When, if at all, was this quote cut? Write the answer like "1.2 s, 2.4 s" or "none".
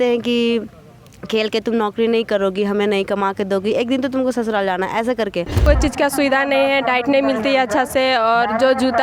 5.6 s